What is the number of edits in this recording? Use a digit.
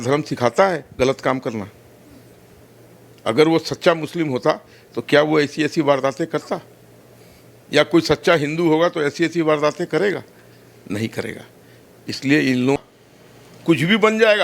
1